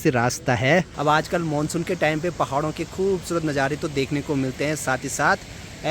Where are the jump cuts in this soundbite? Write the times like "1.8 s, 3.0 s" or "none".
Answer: 0.9 s